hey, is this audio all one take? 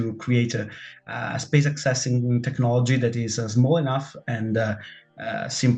yes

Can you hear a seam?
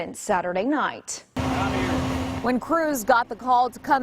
yes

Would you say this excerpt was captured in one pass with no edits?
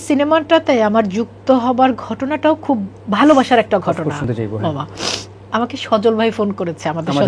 yes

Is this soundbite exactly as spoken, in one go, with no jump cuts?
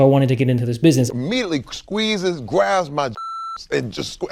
no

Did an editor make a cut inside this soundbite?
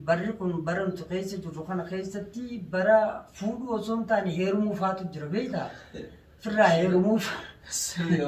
no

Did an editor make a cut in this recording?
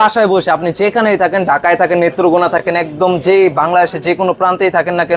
no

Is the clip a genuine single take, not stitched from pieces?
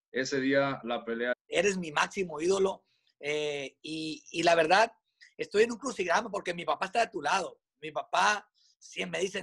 no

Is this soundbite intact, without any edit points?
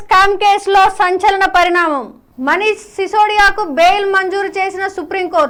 yes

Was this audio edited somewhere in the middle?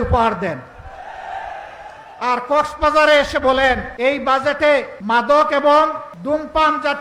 yes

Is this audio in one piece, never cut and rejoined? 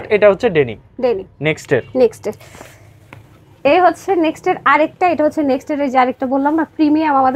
yes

